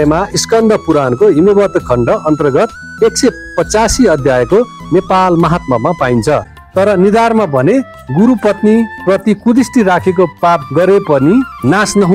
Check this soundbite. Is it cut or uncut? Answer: cut